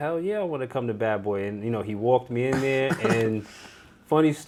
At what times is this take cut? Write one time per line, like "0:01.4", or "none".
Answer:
none